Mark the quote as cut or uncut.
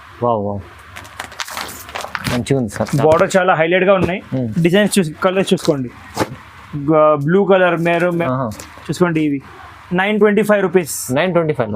cut